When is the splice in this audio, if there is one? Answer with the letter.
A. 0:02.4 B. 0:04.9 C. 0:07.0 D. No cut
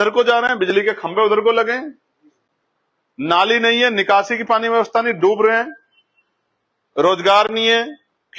D